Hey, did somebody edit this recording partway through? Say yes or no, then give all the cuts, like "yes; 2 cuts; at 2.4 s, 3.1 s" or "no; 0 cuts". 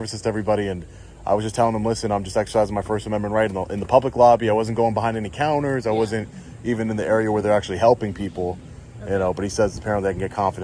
no; 0 cuts